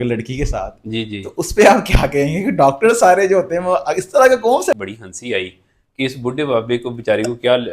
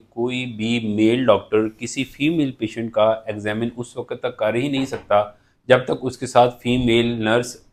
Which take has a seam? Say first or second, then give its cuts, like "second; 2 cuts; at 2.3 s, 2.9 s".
first; 1 cut; at 4.8 s